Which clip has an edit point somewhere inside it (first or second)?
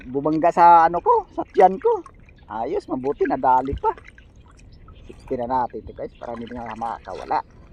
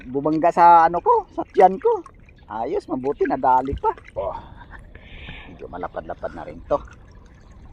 second